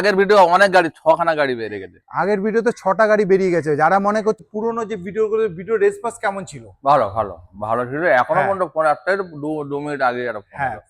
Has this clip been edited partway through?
yes; 1 cut; at 4.4 s

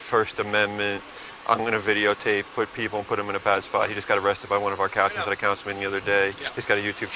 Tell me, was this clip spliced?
no; 0 cuts

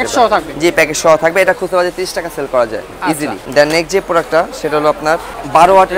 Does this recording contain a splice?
no; 0 cuts

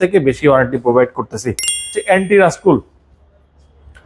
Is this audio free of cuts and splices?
no; 1 cut; at 1.9 s

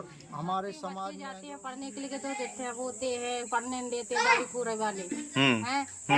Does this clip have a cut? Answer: yes; 1 cut; at 1.2 s

